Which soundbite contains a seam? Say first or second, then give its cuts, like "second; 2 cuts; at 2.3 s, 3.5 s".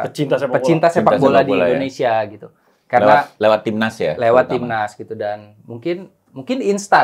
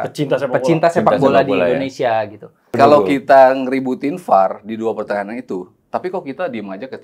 second; 1 cut; at 2.7 s